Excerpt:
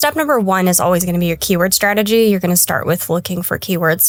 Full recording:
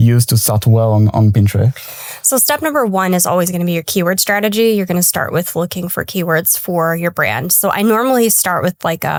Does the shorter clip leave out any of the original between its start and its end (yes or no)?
no